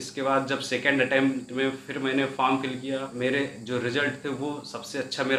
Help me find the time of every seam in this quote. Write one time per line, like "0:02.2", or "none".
0:03.1